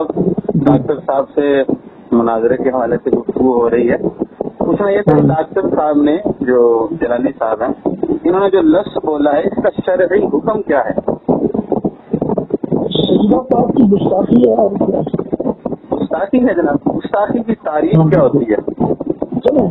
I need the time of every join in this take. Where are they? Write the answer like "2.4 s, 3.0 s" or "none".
none